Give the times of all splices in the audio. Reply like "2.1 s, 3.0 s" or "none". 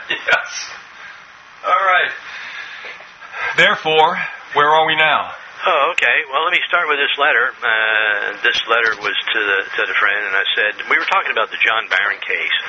11.0 s